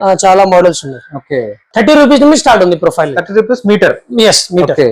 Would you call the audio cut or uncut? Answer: cut